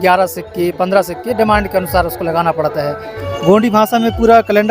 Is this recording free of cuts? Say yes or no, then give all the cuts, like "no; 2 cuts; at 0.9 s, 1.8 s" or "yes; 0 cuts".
no; 1 cut; at 3.2 s